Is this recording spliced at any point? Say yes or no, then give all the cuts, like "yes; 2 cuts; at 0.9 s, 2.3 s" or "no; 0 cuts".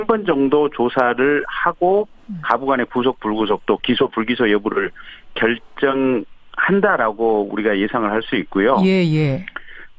no; 0 cuts